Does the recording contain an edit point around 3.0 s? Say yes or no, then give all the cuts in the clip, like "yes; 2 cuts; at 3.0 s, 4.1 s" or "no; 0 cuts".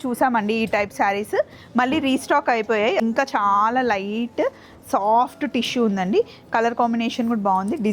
yes; 1 cut; at 3.0 s